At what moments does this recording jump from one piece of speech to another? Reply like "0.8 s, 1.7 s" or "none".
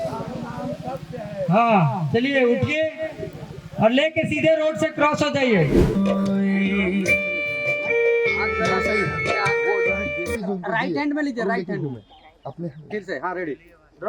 6.0 s

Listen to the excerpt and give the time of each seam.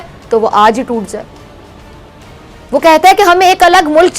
none

